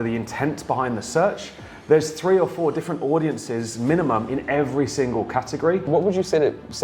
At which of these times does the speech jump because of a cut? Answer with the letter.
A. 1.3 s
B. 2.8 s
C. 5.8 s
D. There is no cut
C